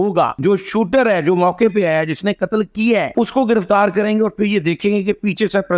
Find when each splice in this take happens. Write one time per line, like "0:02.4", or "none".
none